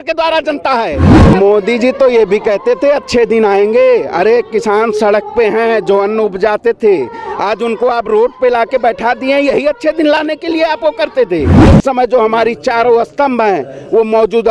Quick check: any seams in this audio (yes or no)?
yes